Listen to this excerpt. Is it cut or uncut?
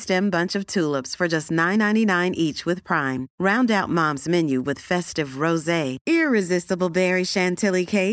uncut